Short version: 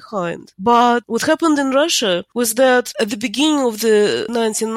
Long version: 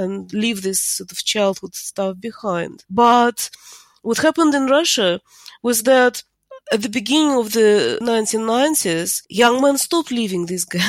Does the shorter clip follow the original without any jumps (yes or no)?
no